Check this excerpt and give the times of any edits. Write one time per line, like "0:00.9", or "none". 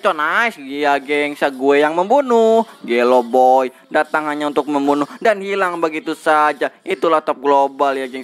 none